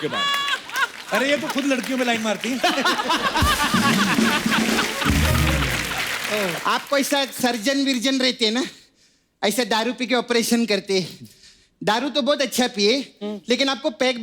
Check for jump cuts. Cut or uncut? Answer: cut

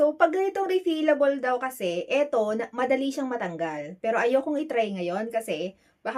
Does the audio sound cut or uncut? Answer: uncut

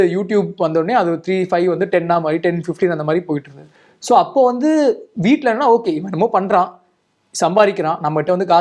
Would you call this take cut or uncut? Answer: uncut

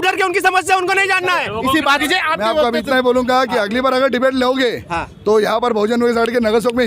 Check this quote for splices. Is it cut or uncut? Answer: cut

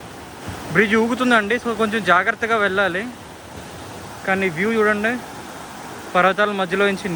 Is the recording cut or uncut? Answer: uncut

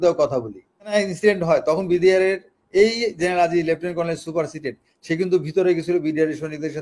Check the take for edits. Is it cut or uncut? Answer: cut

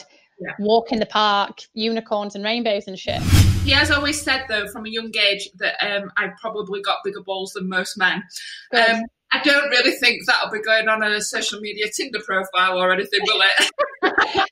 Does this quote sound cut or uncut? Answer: cut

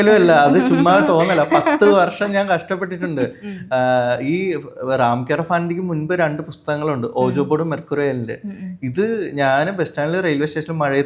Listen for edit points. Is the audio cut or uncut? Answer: uncut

